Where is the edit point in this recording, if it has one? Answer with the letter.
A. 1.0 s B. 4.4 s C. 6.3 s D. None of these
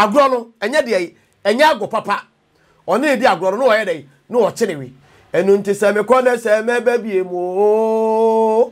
D